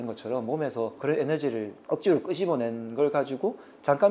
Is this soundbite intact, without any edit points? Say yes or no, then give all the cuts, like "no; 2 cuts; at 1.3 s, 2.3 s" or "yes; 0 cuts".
no; 2 cuts; at 1.0 s, 1.8 s